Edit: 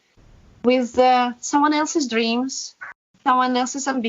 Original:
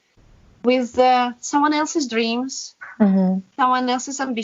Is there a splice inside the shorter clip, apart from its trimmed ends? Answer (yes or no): yes